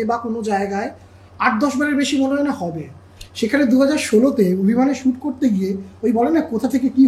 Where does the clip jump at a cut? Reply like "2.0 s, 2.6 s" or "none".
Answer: none